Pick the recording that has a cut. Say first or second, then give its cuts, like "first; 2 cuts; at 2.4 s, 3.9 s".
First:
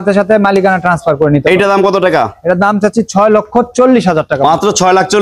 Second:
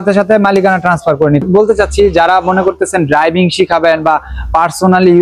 second; 1 cut; at 1.4 s